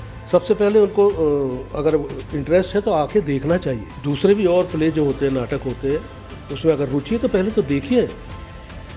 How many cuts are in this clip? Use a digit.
1